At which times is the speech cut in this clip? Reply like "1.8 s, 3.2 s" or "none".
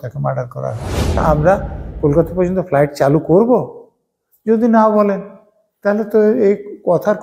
1.2 s